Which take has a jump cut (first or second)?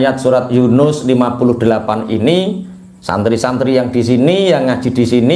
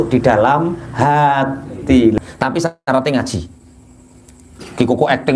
second